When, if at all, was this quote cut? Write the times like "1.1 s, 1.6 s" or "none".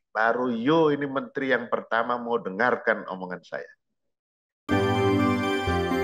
4.5 s